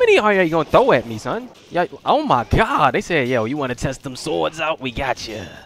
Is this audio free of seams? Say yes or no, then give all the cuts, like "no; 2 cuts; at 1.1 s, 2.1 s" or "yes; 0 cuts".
no; 1 cut; at 1.5 s